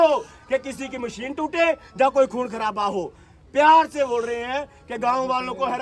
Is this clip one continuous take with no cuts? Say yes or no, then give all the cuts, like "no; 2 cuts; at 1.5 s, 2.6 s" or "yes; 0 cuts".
yes; 0 cuts